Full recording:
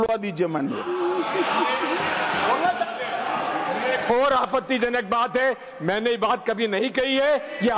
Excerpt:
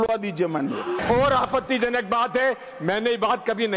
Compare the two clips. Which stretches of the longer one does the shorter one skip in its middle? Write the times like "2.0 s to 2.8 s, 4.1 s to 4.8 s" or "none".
1.0 s to 4.0 s